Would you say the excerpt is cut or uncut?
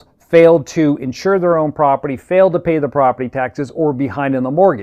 uncut